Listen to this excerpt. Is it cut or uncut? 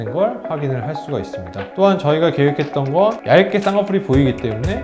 cut